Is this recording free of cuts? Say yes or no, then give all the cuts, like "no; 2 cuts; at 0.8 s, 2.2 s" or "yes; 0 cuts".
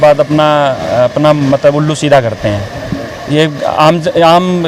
yes; 0 cuts